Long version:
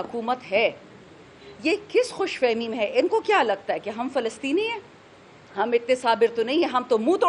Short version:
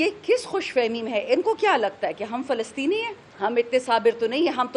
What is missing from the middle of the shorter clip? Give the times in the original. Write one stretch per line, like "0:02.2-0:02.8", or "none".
0:04.9-0:05.4